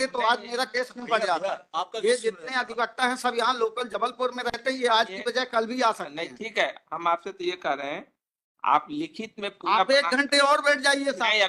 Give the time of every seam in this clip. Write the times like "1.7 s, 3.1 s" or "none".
none